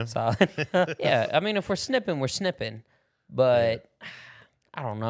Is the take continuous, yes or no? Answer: no